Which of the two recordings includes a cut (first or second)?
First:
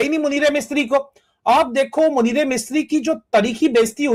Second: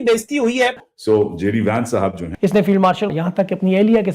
second